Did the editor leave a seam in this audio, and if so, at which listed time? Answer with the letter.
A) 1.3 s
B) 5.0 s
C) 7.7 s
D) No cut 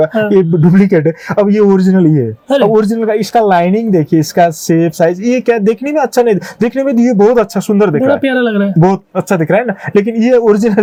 D